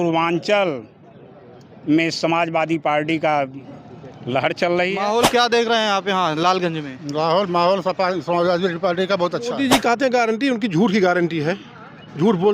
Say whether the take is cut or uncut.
cut